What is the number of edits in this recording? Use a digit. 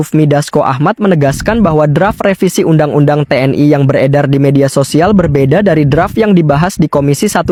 0